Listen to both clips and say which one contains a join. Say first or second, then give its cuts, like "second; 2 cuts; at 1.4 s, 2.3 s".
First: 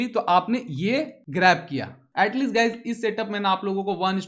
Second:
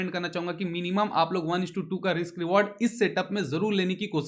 first; 2 cuts; at 1.2 s, 2.0 s